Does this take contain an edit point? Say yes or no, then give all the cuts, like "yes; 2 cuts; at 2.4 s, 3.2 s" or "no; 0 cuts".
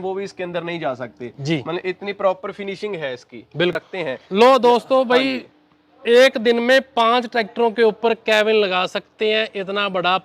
yes; 1 cut; at 3.8 s